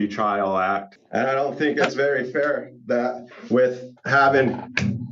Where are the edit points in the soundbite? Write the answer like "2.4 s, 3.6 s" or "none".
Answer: 0.9 s

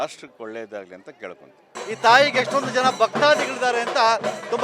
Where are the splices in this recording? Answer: 1.6 s

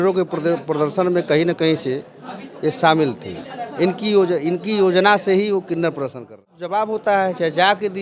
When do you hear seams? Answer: 6.6 s

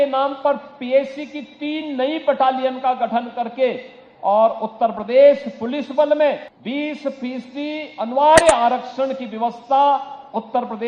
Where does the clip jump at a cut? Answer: 6.5 s

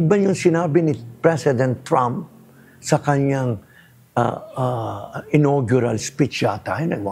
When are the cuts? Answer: none

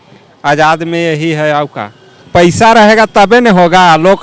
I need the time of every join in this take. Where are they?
2.2 s

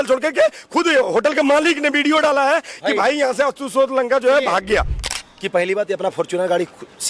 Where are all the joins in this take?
5.0 s

